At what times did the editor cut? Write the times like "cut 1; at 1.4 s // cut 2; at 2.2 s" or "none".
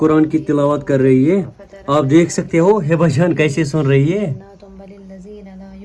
none